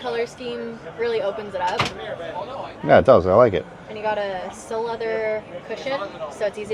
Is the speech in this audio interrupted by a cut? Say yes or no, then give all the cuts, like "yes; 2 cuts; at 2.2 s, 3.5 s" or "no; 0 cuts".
no; 0 cuts